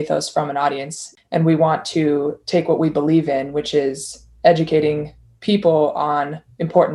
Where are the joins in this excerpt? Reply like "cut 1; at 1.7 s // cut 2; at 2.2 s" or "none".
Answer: cut 1; at 1.0 s